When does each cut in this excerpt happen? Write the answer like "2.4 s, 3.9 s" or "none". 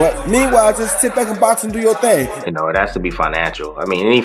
2.4 s